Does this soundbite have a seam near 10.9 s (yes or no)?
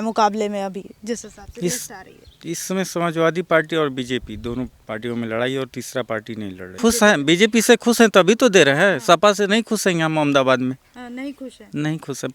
no